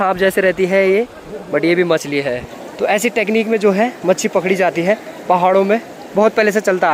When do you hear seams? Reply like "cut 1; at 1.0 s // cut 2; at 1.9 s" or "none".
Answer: cut 1; at 2.5 s